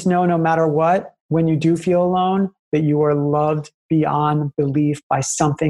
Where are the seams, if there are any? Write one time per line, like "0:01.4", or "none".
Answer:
0:01.2